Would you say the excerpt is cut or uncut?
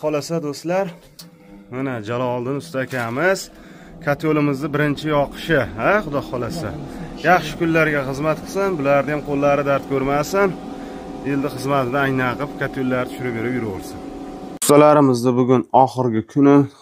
cut